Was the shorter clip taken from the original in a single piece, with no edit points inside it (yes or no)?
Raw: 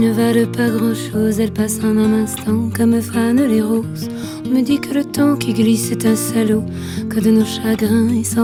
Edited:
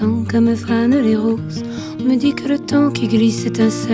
yes